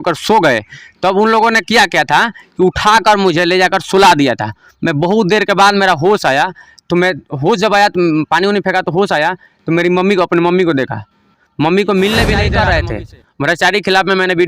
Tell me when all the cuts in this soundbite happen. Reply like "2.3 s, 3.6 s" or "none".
12.5 s